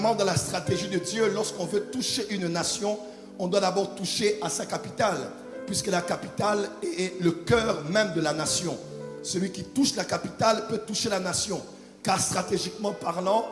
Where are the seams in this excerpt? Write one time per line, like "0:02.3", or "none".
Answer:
none